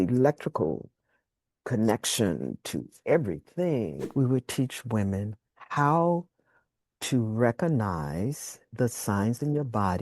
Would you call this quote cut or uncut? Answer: cut